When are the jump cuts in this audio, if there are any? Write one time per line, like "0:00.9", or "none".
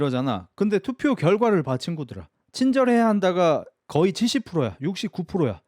none